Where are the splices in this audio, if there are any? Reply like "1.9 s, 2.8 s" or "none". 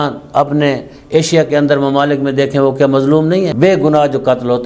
3.5 s